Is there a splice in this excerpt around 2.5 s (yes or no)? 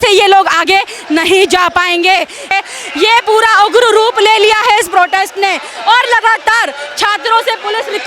yes